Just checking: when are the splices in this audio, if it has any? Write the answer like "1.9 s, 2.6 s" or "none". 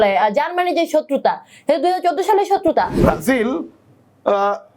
2.9 s